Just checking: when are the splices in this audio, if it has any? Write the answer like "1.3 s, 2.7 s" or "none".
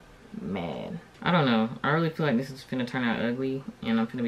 1.0 s